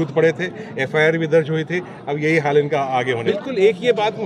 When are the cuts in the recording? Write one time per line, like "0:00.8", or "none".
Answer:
none